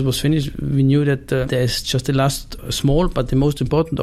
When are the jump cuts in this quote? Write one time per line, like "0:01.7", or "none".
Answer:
0:01.5
0:02.5